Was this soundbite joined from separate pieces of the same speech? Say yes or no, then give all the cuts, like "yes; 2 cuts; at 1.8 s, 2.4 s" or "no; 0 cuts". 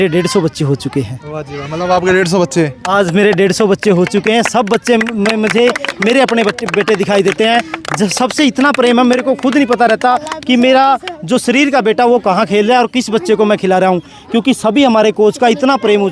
no; 0 cuts